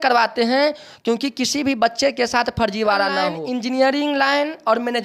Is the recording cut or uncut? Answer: cut